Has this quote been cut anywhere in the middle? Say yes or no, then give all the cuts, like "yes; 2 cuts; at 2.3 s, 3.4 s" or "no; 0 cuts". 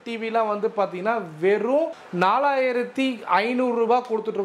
yes; 1 cut; at 2.0 s